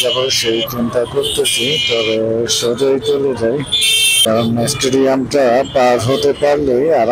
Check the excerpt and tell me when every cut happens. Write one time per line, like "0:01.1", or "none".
0:04.3